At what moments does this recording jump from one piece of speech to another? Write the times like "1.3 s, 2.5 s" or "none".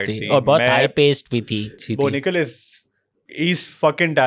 1.8 s